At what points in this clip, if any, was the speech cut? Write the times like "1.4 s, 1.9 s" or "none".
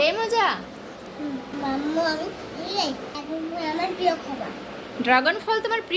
none